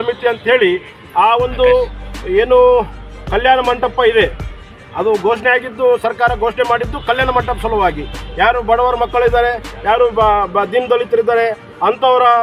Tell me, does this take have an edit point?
no; 0 cuts

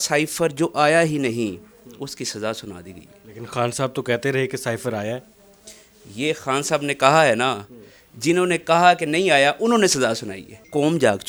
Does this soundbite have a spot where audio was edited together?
no; 0 cuts

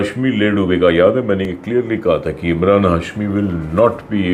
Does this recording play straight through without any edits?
yes; 0 cuts

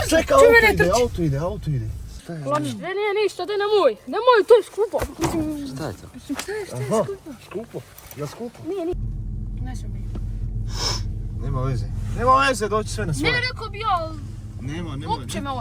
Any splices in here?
yes; 2 cuts; at 2.3 s, 8.9 s

